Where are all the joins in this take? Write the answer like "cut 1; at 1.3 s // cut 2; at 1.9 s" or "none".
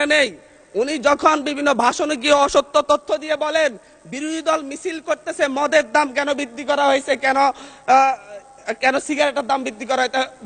none